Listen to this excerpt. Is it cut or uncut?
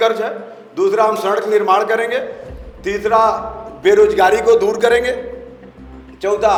uncut